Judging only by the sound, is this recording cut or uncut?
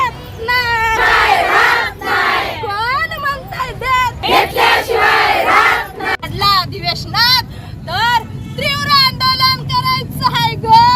cut